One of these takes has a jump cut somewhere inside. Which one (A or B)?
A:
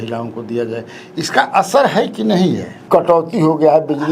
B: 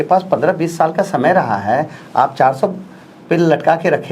A